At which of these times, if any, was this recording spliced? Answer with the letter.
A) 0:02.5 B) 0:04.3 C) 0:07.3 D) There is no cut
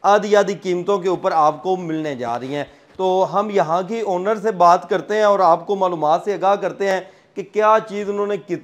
D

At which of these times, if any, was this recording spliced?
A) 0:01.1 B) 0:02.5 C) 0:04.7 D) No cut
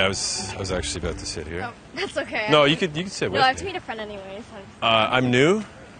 D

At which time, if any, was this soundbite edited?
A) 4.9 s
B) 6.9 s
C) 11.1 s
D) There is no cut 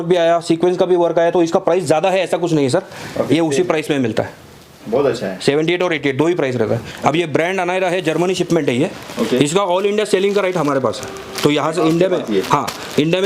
B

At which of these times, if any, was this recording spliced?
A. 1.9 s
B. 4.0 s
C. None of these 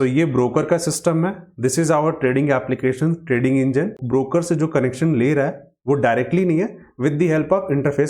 B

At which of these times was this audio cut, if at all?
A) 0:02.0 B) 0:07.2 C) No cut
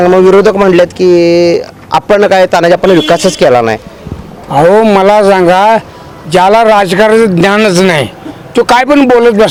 C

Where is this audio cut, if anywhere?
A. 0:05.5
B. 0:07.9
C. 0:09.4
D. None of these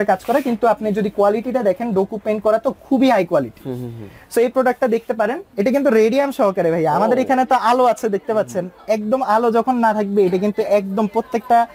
A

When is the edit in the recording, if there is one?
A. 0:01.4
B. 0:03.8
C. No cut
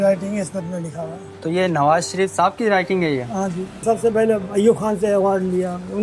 B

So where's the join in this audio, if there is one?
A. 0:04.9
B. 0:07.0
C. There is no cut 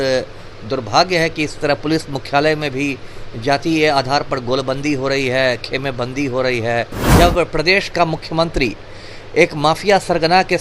B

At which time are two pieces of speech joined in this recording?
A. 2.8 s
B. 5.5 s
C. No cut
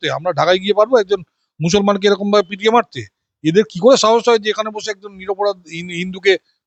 C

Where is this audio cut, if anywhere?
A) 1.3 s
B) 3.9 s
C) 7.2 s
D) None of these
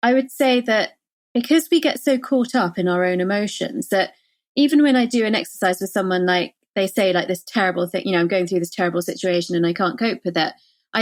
D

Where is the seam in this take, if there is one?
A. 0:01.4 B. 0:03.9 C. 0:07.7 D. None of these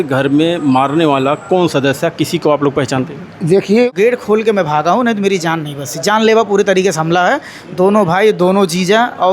B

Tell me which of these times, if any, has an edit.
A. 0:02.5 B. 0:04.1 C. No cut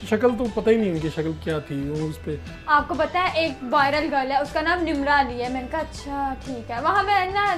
A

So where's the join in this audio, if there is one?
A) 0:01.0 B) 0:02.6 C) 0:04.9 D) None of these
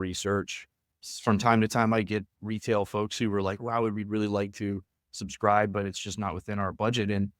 A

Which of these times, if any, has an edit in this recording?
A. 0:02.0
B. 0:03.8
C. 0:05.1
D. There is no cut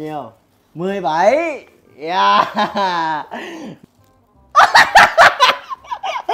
B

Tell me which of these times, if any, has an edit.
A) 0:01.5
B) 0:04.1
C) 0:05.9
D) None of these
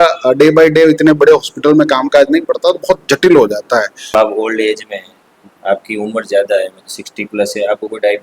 B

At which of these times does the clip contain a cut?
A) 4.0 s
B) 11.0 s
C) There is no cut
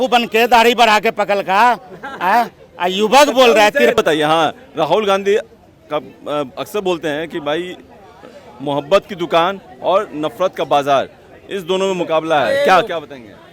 A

